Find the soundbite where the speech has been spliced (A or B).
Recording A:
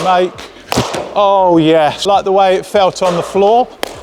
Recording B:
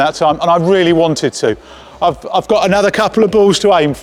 A